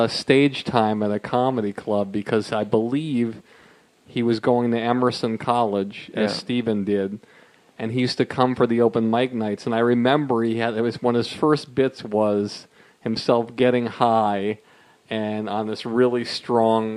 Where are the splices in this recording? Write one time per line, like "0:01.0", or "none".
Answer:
0:03.0

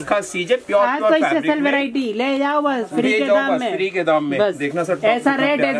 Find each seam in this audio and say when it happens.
none

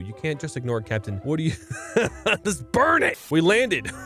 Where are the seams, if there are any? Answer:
0:01.1
0:03.2

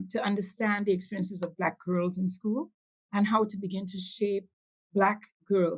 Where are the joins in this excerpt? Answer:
none

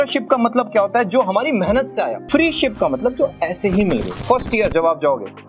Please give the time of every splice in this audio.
0:02.2
0:04.2

